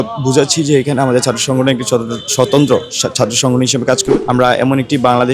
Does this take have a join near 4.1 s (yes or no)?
yes